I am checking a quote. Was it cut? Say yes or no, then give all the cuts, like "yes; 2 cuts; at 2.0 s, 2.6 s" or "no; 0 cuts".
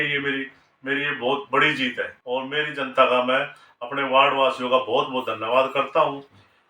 yes; 1 cut; at 2.1 s